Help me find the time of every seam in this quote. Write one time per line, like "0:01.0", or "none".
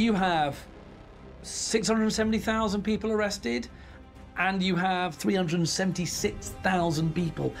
0:05.1